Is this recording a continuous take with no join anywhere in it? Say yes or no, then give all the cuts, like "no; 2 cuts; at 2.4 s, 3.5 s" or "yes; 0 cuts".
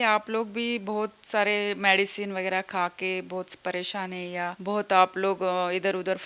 no; 1 cut; at 4.6 s